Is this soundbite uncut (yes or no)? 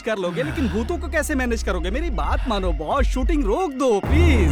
yes